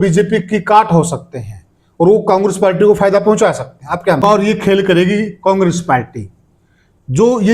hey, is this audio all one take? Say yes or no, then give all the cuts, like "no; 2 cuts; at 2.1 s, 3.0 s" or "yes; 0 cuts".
no; 1 cut; at 4.2 s